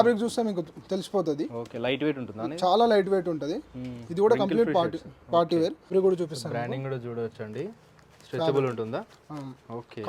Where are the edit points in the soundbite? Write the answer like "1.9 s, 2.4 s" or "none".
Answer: 5.9 s